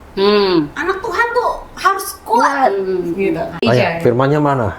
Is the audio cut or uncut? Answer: cut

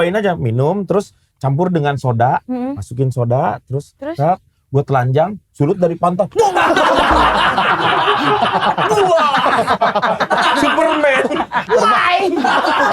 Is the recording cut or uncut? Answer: uncut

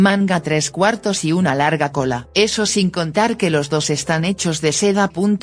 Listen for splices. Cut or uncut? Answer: cut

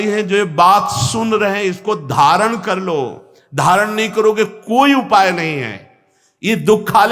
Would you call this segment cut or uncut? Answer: uncut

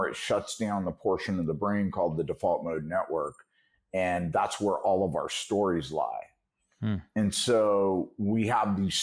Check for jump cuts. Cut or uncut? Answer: uncut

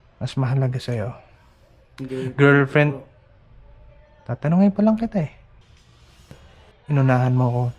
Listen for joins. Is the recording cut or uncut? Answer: uncut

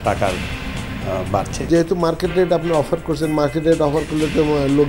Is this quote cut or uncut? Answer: cut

